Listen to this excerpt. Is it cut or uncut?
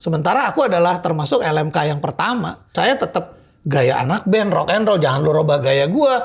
cut